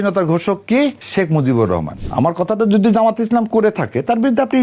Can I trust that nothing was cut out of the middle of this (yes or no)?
no